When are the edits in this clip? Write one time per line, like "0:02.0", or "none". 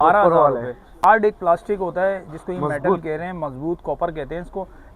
0:01.1

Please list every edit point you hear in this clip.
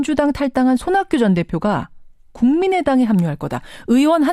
0:02.6

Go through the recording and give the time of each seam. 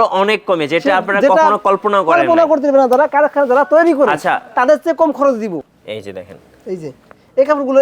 0:05.6

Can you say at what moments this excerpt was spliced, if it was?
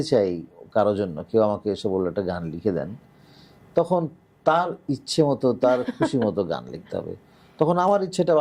none

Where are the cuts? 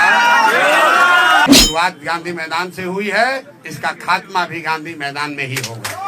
0:01.5

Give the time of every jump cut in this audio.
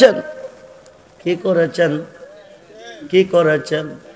none

